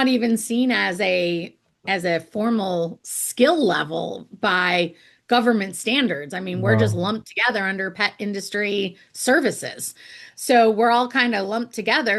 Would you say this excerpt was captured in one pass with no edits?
yes; 0 cuts

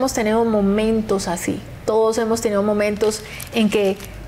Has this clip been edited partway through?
no; 0 cuts

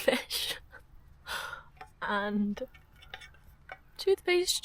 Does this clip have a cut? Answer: no; 0 cuts

